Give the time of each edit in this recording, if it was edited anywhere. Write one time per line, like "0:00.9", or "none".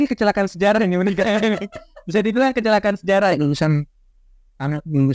0:03.3

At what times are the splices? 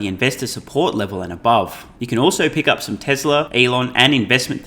0:01.9
0:03.5

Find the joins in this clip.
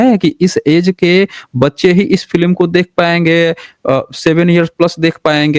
none

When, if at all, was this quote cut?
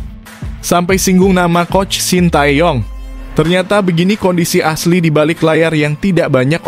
none

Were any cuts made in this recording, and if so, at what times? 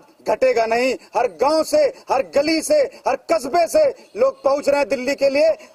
none

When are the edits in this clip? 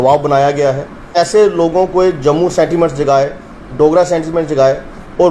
0:01.1

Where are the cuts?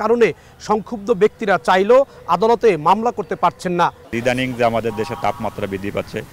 0:04.1

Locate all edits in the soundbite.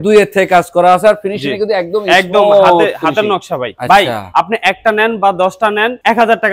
0:03.7

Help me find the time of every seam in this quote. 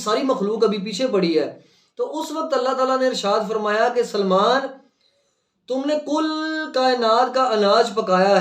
none

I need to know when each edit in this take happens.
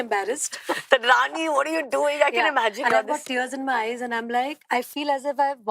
none

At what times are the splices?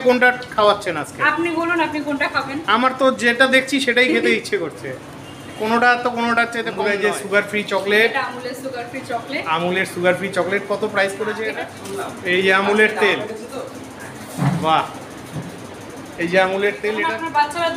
0:06.8
0:11.5
0:17.0

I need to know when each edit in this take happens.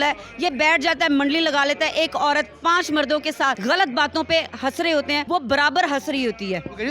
0:03.6
0:05.2

